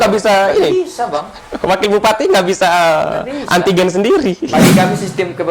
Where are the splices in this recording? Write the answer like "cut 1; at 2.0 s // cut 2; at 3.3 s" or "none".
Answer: cut 1; at 4.4 s